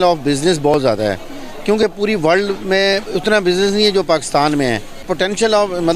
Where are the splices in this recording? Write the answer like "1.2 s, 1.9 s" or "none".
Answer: 5.1 s